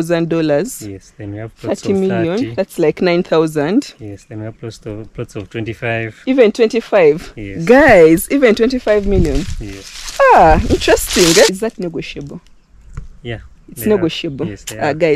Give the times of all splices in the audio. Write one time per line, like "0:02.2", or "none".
0:11.6